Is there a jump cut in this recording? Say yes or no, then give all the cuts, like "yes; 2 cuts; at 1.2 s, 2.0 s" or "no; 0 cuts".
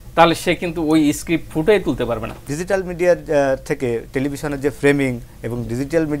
yes; 1 cut; at 2.4 s